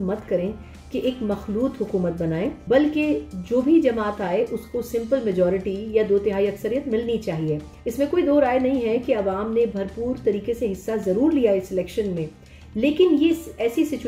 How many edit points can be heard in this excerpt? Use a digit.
2